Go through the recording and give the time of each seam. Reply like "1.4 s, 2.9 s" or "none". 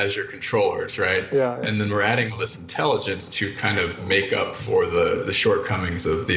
none

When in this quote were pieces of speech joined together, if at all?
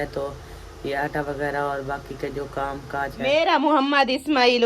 3.1 s

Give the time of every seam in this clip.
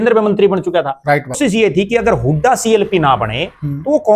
1.4 s

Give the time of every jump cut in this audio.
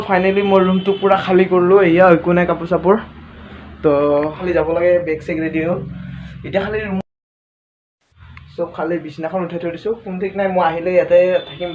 4.4 s

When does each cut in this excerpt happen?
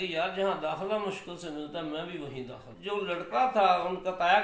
2.7 s

